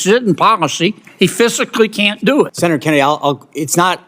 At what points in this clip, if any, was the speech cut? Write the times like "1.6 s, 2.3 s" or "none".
2.5 s